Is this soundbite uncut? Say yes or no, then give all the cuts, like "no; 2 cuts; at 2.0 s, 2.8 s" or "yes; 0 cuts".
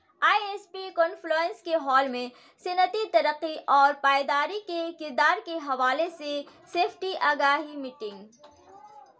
yes; 0 cuts